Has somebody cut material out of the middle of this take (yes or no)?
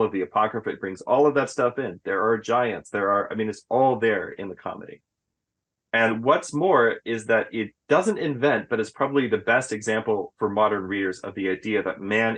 no